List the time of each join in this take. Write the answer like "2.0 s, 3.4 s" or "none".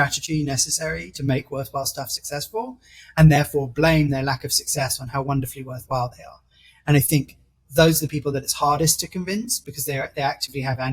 none